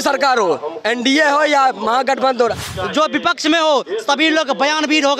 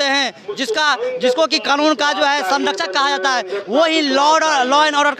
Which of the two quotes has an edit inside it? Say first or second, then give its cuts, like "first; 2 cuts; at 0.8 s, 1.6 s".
first; 1 cut; at 2.7 s